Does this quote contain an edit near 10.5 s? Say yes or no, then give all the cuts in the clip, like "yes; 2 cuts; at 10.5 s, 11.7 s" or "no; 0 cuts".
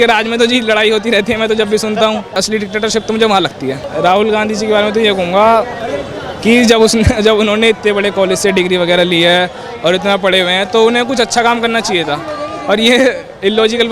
no; 2 cuts; at 2.4 s, 3.8 s